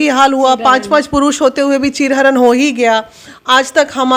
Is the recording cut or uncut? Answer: uncut